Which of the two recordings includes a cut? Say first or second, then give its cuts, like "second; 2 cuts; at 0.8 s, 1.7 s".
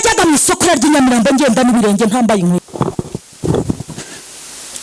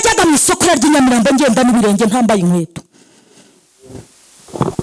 first; 1 cut; at 2.6 s